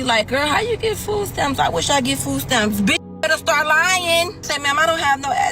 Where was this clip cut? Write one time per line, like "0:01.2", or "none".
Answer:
0:04.5